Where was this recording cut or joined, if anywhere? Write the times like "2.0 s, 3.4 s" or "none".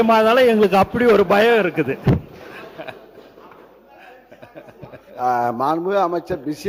none